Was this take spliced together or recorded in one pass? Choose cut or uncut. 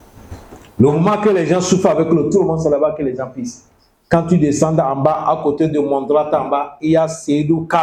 uncut